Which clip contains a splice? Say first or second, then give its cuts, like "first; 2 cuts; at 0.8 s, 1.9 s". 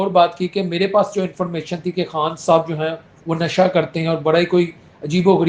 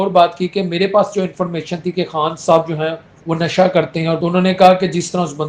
second; 1 cut; at 4.2 s